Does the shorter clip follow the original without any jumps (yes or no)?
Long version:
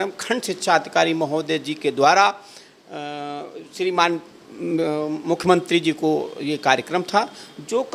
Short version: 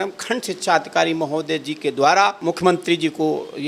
no